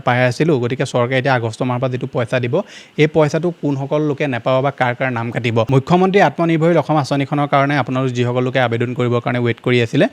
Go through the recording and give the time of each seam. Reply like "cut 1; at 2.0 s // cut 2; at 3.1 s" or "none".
cut 1; at 5.7 s